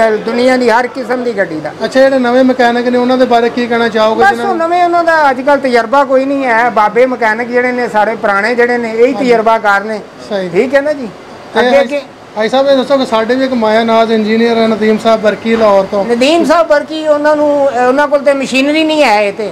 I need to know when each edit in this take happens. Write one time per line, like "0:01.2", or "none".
none